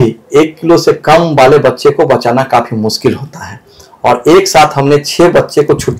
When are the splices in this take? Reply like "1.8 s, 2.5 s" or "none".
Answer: none